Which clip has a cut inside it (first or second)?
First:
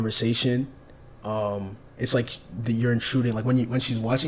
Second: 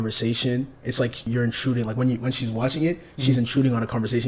second